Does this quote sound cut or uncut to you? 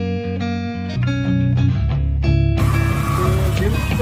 cut